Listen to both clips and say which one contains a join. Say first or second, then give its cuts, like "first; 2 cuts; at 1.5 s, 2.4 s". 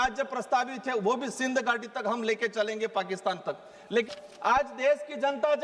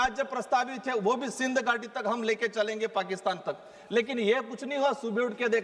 first; 1 cut; at 4.1 s